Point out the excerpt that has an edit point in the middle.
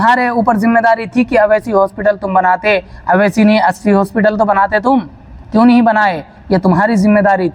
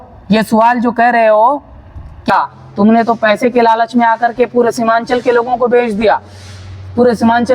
second; 1 cut; at 2.3 s

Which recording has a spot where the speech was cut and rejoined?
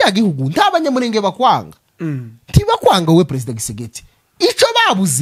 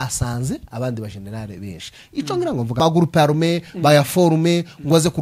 second; 1 cut; at 2.8 s

